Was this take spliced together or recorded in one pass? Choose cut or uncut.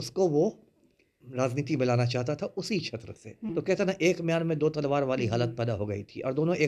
cut